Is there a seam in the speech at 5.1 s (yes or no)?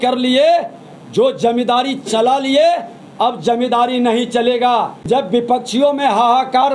yes